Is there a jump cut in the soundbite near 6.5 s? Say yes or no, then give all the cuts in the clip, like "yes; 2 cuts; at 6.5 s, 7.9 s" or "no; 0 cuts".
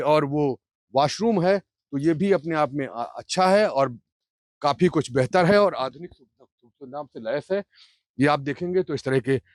no; 0 cuts